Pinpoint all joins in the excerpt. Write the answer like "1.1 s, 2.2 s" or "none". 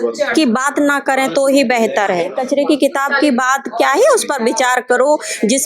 2.3 s